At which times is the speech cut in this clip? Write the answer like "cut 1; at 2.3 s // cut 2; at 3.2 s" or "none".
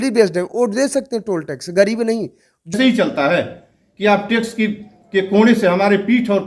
cut 1; at 2.7 s